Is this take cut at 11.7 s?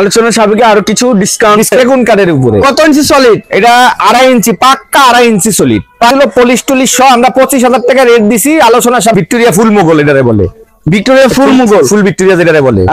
no; 3 cuts; at 1.7 s, 6.1 s, 9.1 s

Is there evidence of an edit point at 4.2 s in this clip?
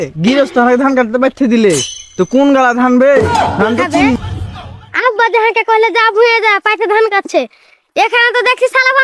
yes; 1 cut; at 4.2 s

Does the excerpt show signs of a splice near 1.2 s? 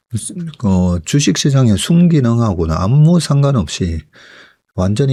no; 0 cuts

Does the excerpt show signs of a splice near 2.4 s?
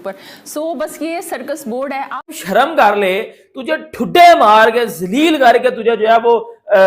yes; 1 cut; at 2.4 s

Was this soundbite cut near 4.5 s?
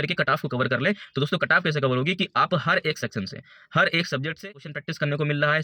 yes; 1 cut; at 4.5 s

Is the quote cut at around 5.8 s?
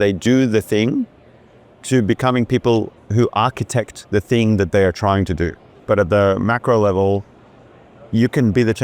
yes; 1 cut; at 5.8 s

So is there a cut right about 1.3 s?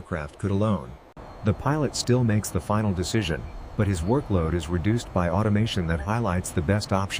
yes; 1 cut; at 1.3 s

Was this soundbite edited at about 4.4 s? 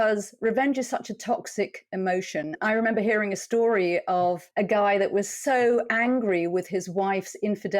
yes; 2 cuts; at 2.6 s, 4.4 s

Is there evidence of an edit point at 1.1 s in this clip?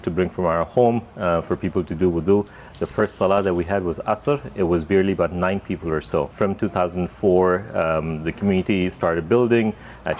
no; 0 cuts

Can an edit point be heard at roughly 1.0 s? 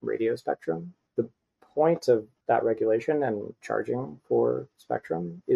yes; 2 cuts; at 1.0 s, 2.3 s

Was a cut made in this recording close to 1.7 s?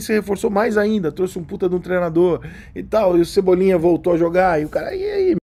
no; 0 cuts

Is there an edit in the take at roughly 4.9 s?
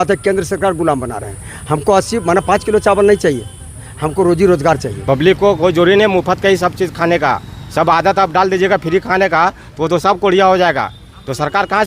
yes; 1 cut; at 4.9 s

